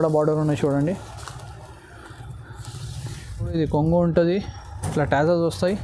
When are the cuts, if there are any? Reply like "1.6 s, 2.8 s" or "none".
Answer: 3.5 s